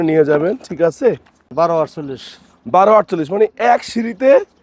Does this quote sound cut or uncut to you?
cut